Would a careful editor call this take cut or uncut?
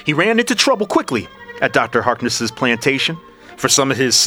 uncut